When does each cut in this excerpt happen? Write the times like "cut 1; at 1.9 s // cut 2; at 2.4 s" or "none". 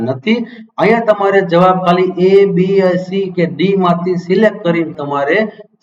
cut 1; at 4.9 s